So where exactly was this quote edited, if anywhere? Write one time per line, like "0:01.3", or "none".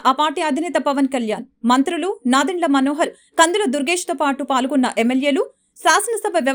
none

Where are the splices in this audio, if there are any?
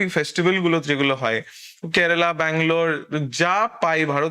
none

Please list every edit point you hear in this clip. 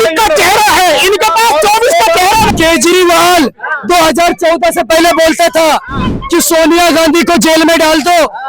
0:02.5

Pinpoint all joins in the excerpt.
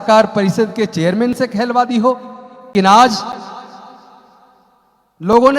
0:02.7

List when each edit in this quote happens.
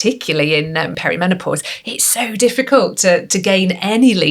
0:01.0

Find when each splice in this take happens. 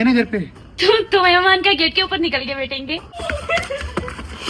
0:03.2

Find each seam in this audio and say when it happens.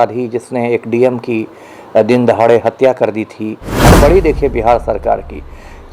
0:03.8

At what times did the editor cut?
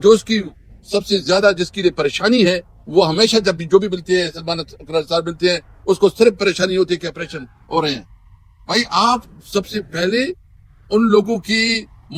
none

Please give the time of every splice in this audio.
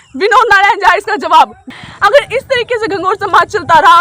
0:01.6

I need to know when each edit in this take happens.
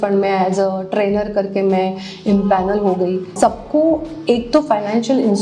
0:03.3

